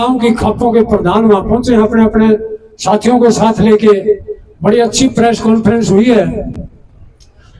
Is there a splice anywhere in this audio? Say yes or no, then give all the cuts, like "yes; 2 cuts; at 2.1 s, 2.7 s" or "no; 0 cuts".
no; 0 cuts